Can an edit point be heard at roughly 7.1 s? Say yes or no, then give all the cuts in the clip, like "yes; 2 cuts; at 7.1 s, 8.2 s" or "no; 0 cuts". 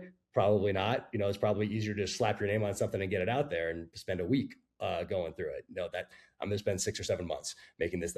no; 0 cuts